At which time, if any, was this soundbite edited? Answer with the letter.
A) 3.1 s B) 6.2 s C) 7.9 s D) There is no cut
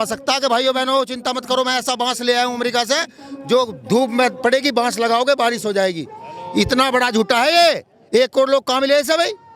D